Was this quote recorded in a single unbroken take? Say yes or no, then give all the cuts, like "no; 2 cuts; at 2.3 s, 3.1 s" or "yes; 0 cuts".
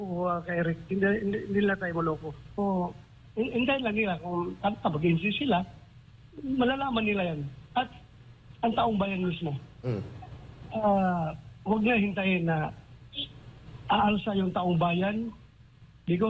no; 1 cut; at 2.6 s